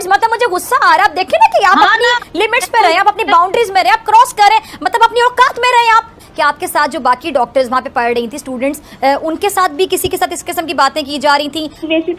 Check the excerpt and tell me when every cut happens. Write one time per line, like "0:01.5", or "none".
0:06.2

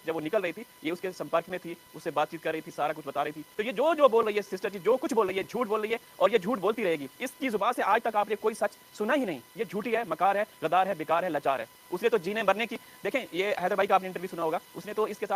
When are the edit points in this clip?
0:03.5
0:11.8

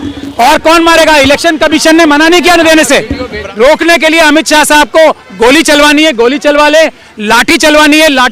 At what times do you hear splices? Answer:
0:03.4

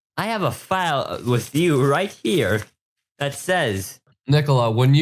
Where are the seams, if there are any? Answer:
0:04.1

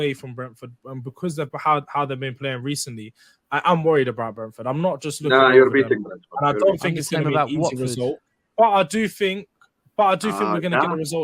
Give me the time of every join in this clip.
none

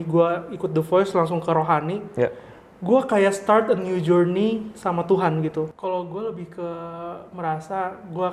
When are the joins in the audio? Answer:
0:05.7

